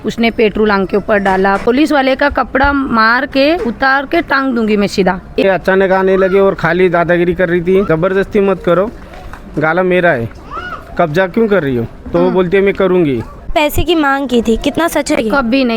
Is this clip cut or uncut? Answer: cut